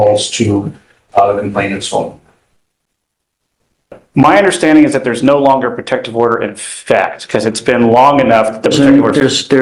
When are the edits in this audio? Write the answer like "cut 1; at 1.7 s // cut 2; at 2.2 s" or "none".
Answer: none